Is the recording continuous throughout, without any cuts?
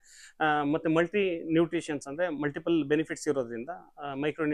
yes; 0 cuts

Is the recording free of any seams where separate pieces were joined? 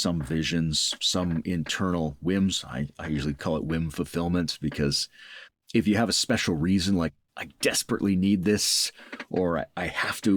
yes; 0 cuts

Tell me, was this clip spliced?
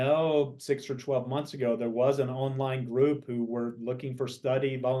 no; 0 cuts

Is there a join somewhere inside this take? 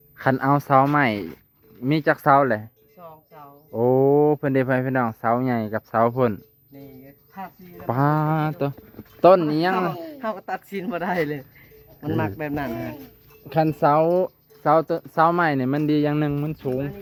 no; 0 cuts

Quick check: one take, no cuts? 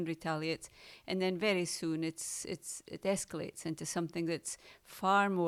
yes; 0 cuts

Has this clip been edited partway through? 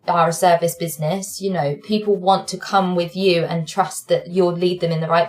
yes; 1 cut; at 4.3 s

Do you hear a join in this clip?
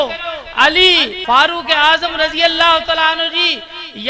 yes; 1 cut; at 1.1 s

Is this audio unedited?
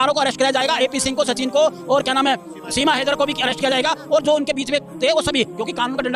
yes; 0 cuts

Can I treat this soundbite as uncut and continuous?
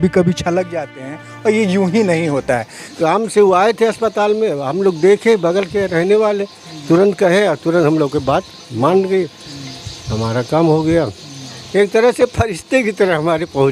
no; 1 cut; at 2.9 s

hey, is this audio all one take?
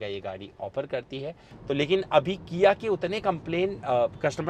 no; 1 cut; at 1.4 s

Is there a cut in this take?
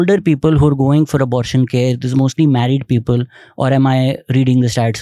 no; 0 cuts

